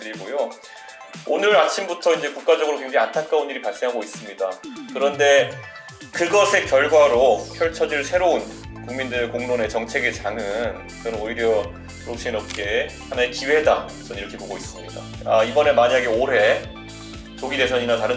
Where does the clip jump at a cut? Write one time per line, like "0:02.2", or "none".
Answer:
0:15.1